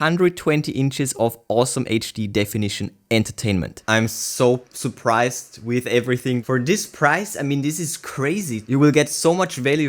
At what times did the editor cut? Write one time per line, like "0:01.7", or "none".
0:03.8
0:08.6